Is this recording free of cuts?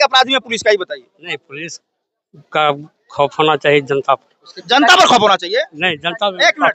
yes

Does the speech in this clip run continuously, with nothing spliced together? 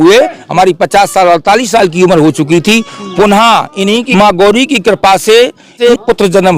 no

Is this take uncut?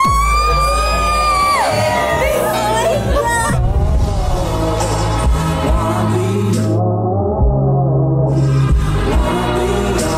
yes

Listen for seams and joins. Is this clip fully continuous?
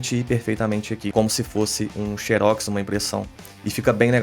no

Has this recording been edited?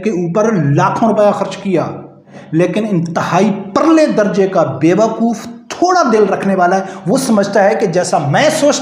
yes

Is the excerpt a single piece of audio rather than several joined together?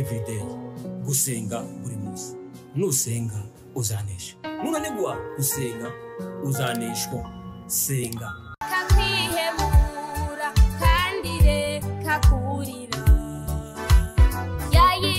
yes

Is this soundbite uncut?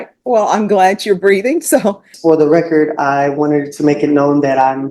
no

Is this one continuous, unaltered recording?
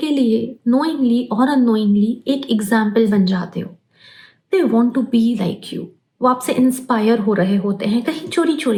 yes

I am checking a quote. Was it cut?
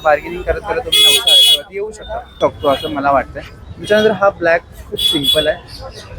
yes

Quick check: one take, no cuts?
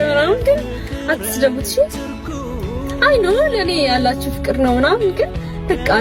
yes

